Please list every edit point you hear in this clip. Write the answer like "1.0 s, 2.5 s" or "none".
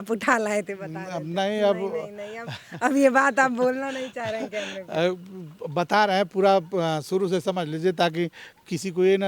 none